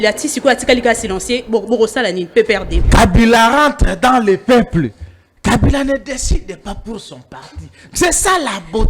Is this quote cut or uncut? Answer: cut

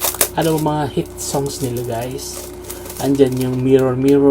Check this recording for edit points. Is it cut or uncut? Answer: uncut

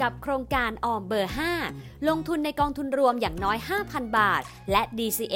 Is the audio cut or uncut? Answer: uncut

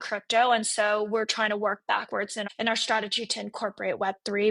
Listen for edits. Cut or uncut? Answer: cut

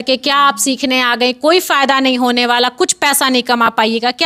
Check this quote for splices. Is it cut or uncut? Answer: uncut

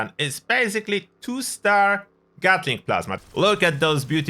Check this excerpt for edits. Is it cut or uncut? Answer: cut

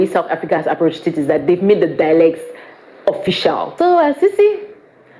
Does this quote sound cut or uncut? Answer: cut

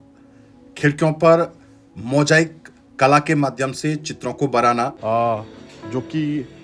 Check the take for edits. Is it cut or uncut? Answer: cut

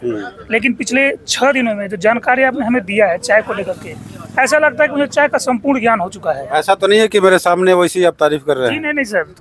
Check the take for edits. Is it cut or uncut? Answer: uncut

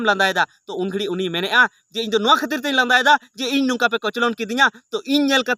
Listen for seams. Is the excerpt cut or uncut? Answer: uncut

